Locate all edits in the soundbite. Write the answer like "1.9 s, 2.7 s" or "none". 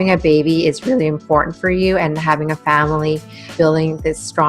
3.4 s